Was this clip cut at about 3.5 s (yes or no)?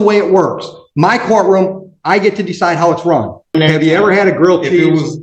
yes